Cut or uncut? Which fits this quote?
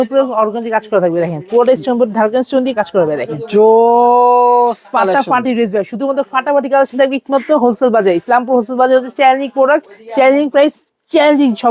uncut